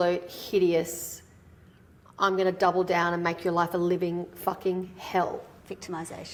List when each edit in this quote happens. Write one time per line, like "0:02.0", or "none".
none